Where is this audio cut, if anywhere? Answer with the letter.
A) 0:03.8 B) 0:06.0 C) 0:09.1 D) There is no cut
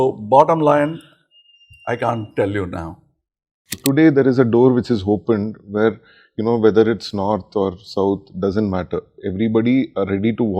A